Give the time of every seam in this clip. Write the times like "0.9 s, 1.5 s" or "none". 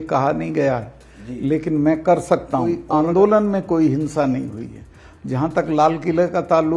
2.8 s